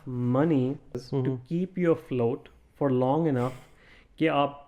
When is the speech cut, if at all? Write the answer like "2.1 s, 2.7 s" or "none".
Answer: 1.0 s